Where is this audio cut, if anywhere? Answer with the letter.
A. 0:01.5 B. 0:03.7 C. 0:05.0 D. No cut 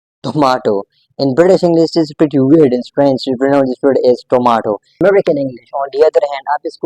C